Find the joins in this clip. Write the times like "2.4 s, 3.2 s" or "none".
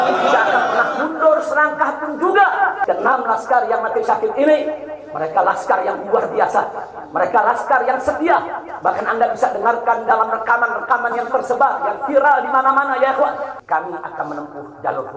2.8 s, 13.5 s